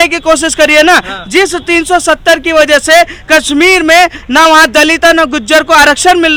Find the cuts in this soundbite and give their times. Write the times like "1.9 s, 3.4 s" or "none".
none